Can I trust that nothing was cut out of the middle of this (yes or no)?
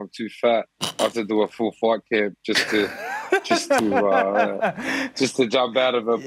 yes